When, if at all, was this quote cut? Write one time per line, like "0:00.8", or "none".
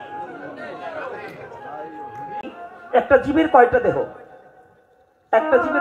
0:02.5